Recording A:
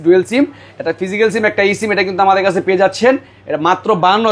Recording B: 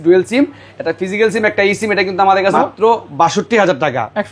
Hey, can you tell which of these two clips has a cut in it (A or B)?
B